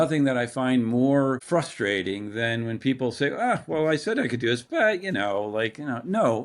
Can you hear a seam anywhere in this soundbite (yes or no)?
yes